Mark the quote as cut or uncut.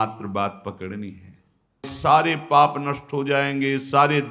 cut